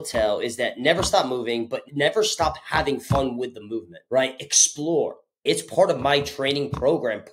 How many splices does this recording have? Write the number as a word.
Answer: two